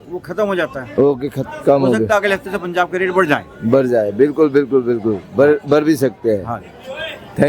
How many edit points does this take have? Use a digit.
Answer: 1